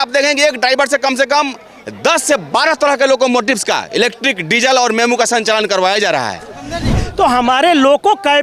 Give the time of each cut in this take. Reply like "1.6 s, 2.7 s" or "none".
7.0 s